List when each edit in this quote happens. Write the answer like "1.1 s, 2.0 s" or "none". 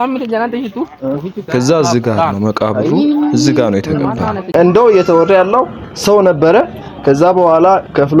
4.5 s